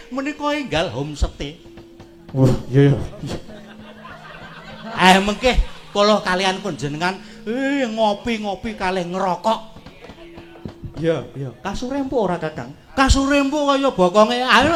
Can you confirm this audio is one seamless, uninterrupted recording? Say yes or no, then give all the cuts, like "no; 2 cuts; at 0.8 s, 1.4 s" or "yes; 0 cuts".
yes; 0 cuts